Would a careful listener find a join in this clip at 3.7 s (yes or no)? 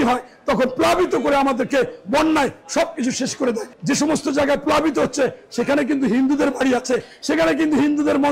yes